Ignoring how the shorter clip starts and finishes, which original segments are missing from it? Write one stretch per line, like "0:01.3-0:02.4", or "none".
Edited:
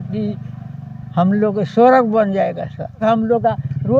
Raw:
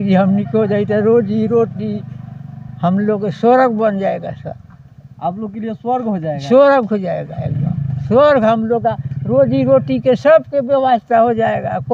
0:04.7-0:08.4